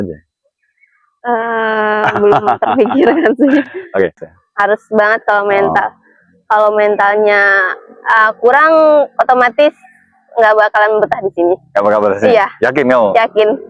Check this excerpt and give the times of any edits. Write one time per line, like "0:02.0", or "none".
0:04.2